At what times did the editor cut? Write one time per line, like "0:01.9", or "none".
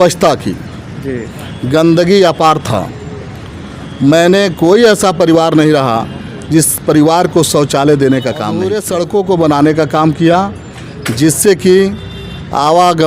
0:08.6